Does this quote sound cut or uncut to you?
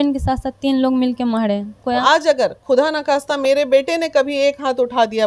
cut